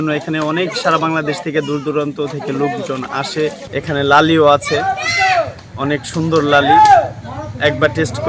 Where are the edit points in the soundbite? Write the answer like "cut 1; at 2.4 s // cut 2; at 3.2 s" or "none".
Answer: cut 1; at 3.6 s